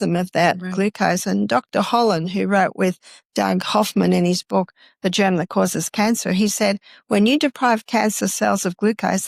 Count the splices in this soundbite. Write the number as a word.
zero